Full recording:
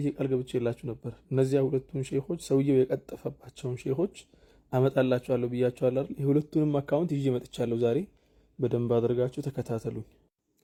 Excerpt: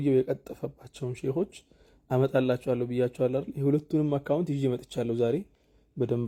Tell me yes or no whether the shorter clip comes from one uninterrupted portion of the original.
yes